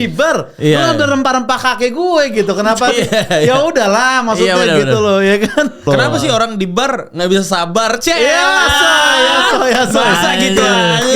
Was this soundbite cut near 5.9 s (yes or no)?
yes